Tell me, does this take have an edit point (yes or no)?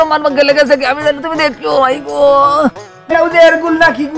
yes